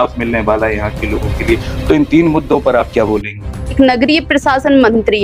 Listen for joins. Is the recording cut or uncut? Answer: cut